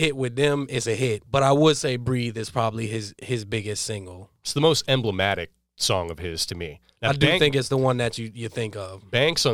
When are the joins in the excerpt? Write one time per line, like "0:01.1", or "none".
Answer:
0:01.2
0:06.8